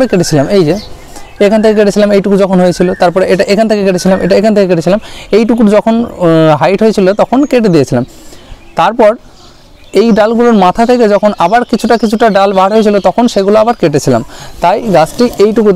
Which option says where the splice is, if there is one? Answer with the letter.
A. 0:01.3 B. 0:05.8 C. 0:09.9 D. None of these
D